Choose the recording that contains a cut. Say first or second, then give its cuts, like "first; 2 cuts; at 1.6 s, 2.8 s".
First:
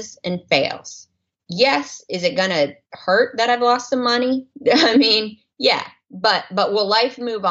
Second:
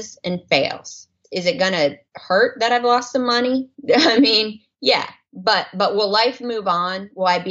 second; 1 cut; at 1.2 s